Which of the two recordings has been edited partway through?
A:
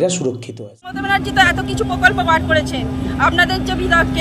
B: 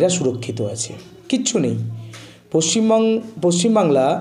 A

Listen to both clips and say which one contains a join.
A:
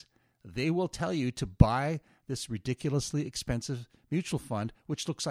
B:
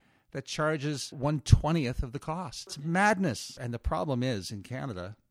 B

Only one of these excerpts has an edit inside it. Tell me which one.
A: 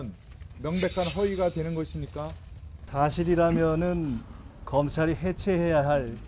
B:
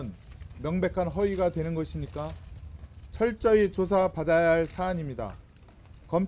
A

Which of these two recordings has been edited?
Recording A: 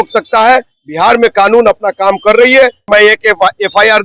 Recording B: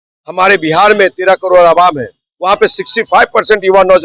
A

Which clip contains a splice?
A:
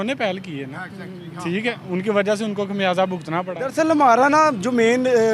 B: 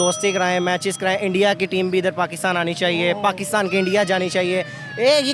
A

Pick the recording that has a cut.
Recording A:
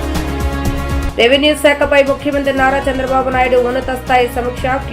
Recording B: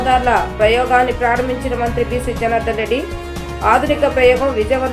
A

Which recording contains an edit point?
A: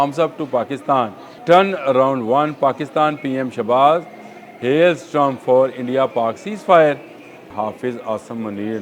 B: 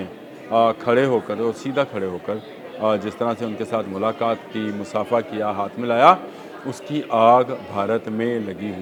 A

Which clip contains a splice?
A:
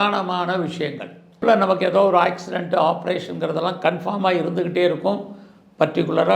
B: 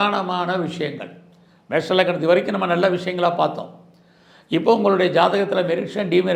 A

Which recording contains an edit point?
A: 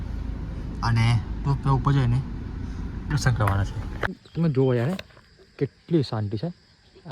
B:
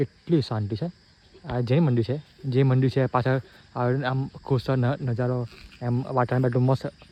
A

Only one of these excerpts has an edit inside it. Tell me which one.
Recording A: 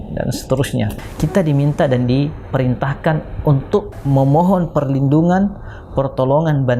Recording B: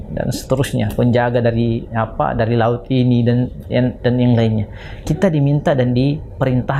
A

